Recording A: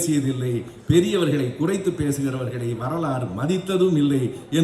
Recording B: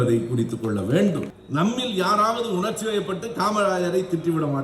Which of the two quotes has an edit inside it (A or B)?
B